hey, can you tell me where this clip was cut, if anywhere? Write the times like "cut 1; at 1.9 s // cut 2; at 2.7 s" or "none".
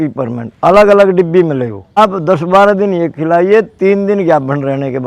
cut 1; at 2.0 s